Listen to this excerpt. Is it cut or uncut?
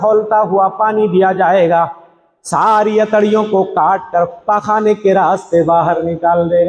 uncut